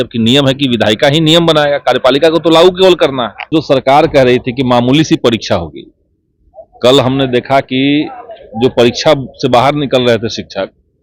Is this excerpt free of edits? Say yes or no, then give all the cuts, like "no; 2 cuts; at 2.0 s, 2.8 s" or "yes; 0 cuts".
no; 1 cut; at 3.5 s